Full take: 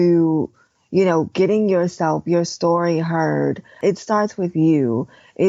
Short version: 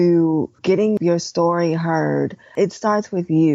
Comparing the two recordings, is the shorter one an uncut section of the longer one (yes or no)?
no